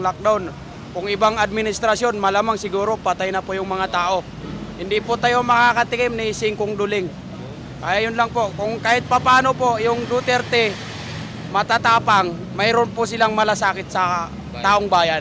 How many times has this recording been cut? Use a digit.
0